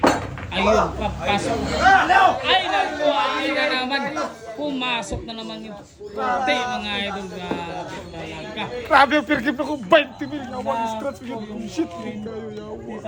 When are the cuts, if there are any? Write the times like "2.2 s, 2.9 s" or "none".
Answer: none

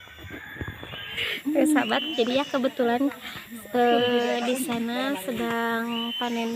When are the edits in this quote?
1.2 s

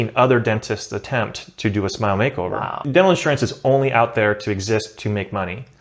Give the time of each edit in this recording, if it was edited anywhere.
2.9 s

